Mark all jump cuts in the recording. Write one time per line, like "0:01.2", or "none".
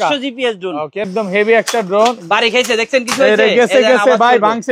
0:01.1